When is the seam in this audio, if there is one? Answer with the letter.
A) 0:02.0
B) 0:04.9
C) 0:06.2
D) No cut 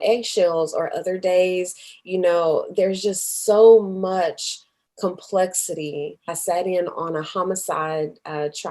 C